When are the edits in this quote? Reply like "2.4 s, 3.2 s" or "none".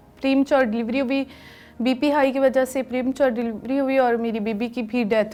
none